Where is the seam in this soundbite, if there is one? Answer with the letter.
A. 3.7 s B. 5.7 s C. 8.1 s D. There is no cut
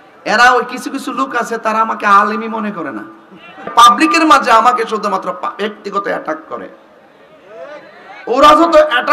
A